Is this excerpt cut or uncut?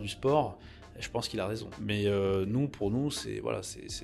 cut